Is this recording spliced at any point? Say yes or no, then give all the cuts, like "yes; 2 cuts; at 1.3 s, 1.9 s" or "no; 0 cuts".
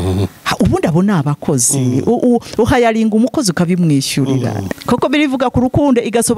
yes; 1 cut; at 4.7 s